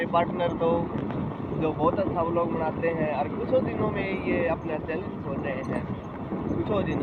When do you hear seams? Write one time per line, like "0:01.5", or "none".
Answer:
none